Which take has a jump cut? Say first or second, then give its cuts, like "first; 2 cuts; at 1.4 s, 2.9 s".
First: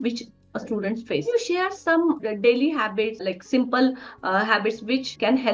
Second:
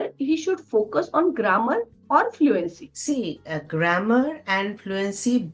first; 3 cuts; at 1.2 s, 2.2 s, 3.2 s